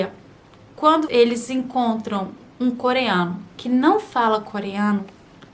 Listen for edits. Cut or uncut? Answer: cut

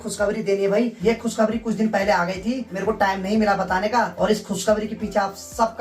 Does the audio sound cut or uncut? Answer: uncut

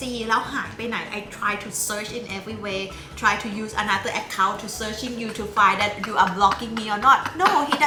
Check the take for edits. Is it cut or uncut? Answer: uncut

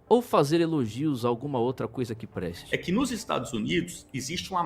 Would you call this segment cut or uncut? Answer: cut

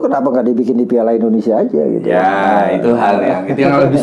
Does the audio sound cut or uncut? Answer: uncut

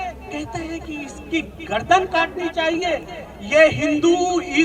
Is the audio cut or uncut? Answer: uncut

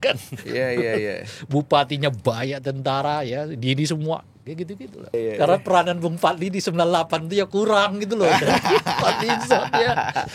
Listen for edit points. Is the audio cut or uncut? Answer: cut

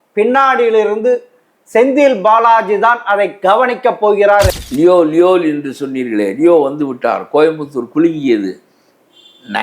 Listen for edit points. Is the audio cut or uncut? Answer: cut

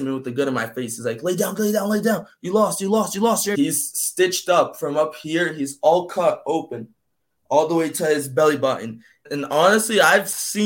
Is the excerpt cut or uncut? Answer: cut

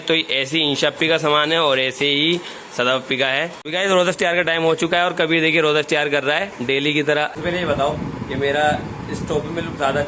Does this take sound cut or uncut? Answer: cut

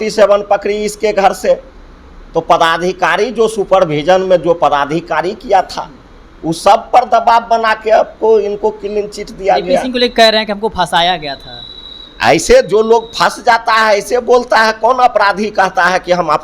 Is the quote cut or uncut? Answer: uncut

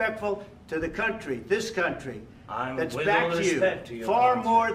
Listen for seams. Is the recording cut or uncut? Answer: uncut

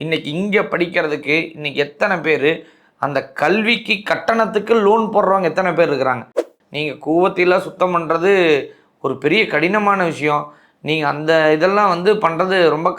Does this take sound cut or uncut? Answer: cut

